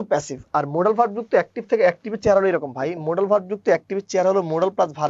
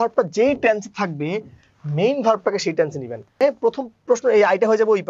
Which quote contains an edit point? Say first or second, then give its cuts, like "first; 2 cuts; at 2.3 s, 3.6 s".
second; 1 cut; at 3.4 s